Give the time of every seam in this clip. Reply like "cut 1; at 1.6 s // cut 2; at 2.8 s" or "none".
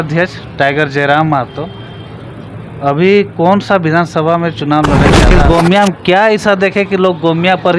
cut 1; at 5.2 s